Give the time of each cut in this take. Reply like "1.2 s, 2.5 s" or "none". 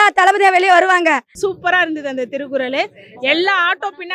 1.3 s